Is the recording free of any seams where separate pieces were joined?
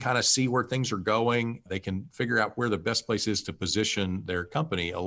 no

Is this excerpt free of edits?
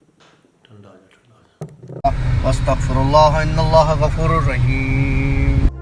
no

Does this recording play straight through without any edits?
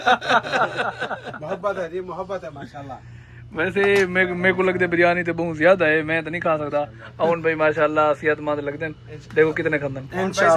yes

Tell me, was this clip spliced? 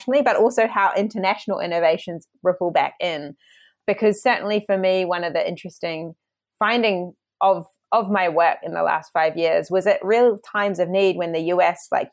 no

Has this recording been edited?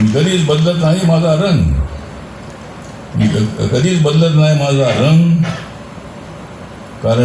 no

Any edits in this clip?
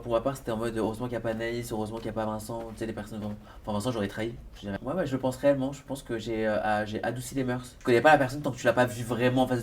yes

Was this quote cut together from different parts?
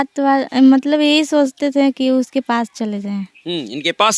no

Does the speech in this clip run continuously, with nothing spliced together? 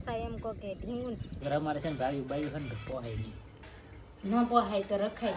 no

